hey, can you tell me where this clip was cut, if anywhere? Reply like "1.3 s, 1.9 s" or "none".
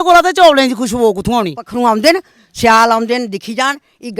1.6 s